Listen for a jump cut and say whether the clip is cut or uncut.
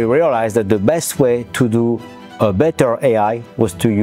uncut